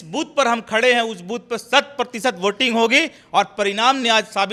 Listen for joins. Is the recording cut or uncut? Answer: uncut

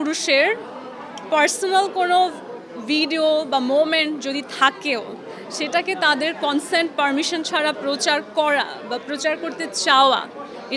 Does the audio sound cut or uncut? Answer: uncut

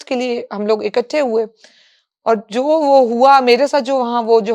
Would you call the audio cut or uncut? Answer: uncut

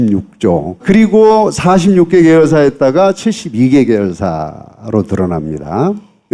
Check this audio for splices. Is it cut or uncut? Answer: uncut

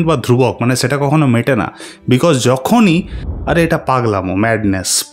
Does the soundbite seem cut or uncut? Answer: cut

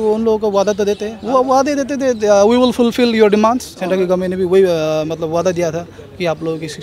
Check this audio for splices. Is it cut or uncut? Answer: cut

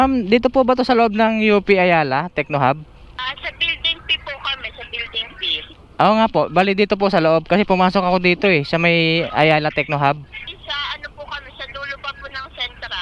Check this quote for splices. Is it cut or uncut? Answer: cut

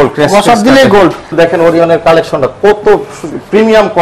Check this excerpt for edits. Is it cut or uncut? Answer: cut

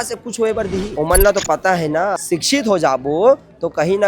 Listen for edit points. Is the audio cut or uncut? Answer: cut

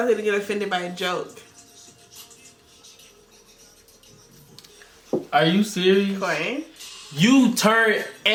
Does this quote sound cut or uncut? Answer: uncut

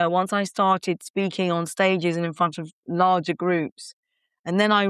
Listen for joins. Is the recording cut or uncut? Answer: uncut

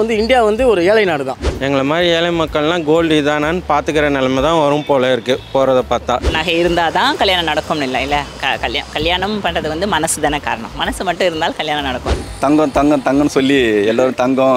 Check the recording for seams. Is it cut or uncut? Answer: cut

